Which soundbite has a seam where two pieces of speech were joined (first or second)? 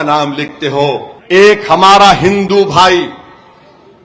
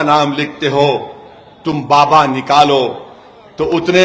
first